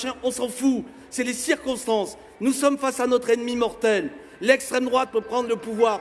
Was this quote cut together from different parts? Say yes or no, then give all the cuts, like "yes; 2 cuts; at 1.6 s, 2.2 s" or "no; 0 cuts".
no; 0 cuts